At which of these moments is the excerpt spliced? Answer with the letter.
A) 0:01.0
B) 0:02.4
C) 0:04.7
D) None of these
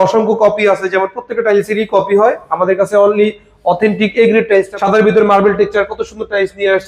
C